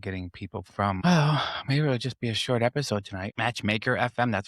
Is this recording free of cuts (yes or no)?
no